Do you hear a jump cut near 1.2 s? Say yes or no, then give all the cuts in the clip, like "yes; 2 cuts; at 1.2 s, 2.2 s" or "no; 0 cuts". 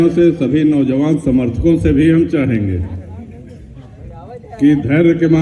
no; 0 cuts